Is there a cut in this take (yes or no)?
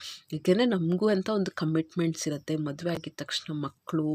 no